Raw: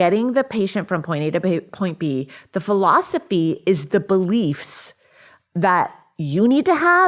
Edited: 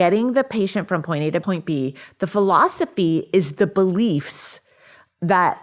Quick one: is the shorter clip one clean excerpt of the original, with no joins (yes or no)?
no